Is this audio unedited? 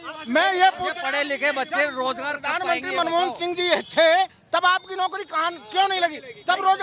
yes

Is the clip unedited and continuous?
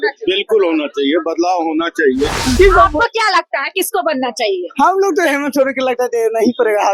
no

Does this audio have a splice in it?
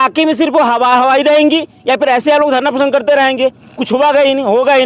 no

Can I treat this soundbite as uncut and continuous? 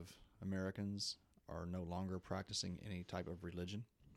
yes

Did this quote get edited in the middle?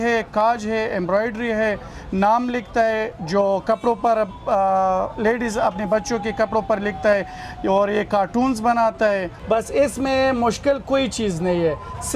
no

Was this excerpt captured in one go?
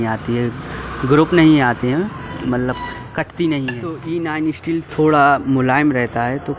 no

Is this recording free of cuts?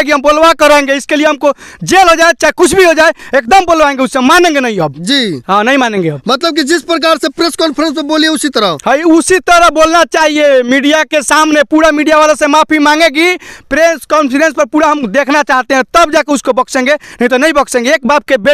yes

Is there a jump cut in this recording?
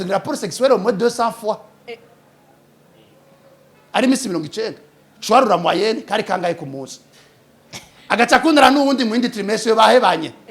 no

